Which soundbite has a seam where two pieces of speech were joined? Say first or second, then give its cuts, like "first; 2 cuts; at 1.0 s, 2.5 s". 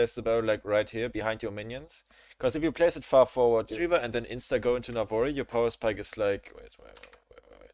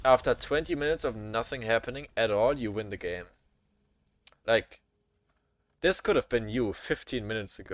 first; 1 cut; at 3.7 s